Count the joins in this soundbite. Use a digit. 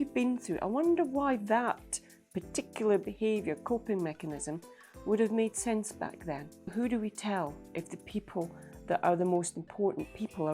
1